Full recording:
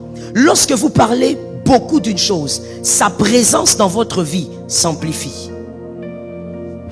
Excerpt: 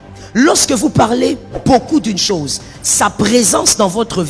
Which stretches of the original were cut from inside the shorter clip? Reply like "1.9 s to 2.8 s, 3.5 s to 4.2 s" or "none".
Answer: none